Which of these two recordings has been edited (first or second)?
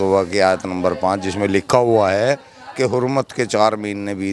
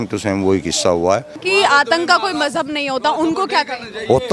second